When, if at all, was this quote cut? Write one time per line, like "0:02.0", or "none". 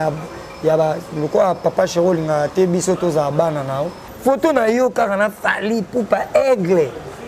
0:04.0